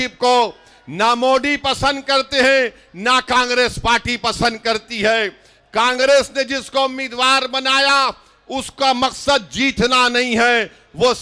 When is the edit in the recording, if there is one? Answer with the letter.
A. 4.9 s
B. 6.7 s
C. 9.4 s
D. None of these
D